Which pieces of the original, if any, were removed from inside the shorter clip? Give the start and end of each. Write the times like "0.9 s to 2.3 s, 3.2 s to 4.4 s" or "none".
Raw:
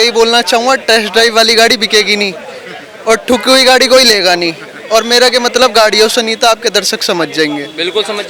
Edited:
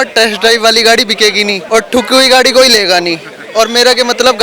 2.3 s to 3.0 s